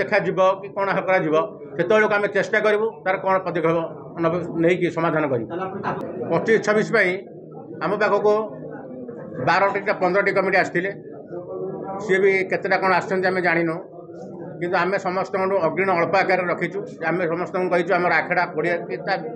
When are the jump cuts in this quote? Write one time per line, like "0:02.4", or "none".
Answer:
0:06.0

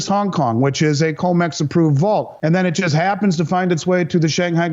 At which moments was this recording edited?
0:02.3

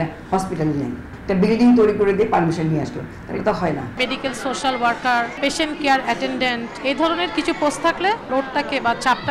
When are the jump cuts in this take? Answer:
0:01.1
0:03.9
0:05.4
0:06.7
0:08.2

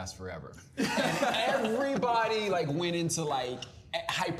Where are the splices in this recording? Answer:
none

